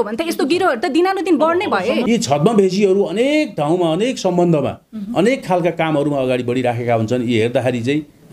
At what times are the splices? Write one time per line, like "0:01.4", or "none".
0:02.0